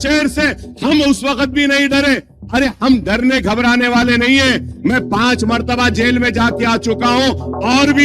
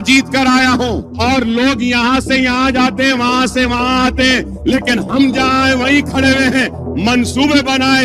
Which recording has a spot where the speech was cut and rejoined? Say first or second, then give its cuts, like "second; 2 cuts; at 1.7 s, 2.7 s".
second; 1 cut; at 1.1 s